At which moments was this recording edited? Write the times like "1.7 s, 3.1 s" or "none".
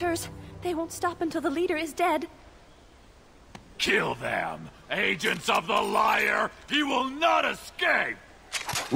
none